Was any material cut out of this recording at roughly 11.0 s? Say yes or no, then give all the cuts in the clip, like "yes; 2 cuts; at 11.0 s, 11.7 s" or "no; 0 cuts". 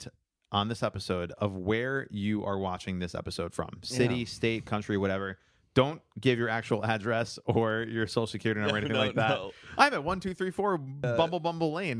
yes; 1 cut; at 11.0 s